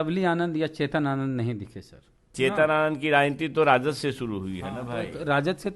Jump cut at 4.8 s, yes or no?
no